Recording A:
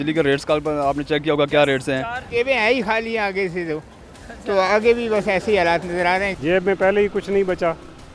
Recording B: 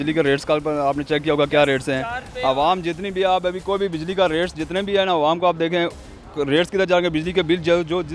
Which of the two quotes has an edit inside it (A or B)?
A